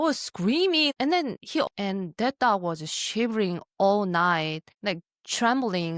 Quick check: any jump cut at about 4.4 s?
no; 1 cut; at 1.7 s

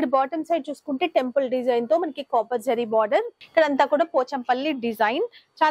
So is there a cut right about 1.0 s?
no; 1 cut; at 3.4 s

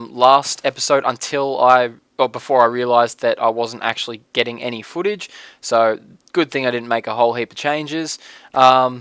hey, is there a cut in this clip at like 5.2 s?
yes; 1 cut; at 5.2 s

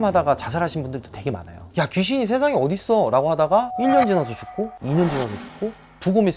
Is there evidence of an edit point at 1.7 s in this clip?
yes; 1 cut; at 1.7 s

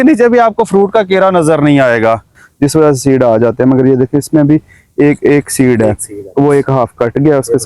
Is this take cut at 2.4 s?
yes; 1 cut; at 2.4 s

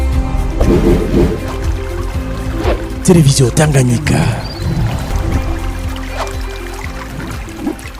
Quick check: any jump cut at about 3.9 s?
no; 0 cuts

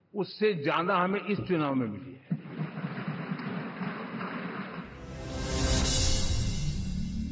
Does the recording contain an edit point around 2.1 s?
no; 0 cuts

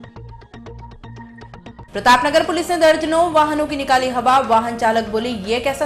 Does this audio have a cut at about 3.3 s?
no; 1 cut; at 1.8 s

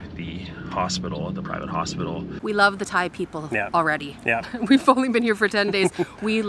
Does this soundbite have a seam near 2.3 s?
yes; 1 cut; at 2.3 s

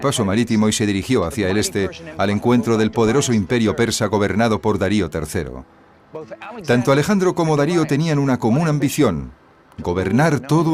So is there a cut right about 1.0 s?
yes; 1 cut; at 1.0 s

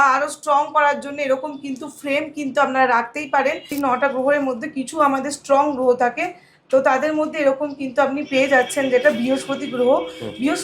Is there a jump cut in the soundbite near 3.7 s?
yes; 1 cut; at 3.7 s

